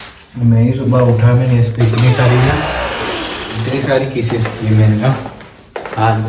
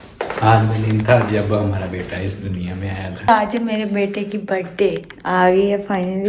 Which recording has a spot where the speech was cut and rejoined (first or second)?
second